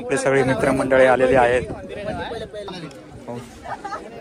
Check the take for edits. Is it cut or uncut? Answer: cut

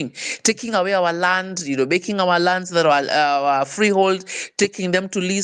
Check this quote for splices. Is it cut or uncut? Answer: uncut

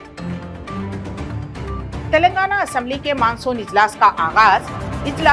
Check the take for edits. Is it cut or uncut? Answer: cut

